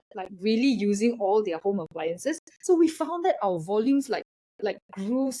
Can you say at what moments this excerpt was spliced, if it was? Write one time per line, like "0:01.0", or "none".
none